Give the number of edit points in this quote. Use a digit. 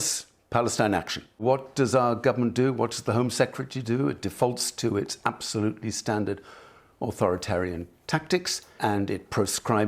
2